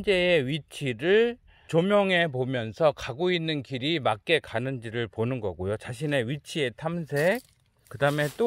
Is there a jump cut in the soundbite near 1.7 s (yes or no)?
yes